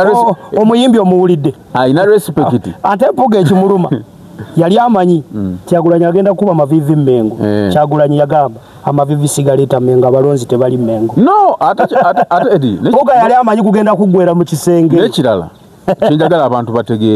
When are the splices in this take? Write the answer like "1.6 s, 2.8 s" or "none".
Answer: none